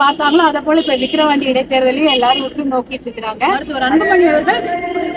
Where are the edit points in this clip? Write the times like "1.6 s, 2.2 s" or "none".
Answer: 3.7 s